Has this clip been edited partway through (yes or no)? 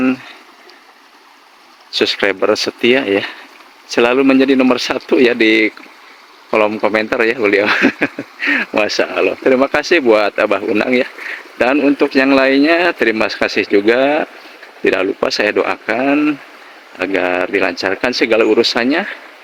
no